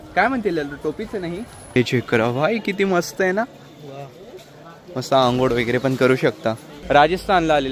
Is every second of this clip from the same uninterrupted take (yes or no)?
no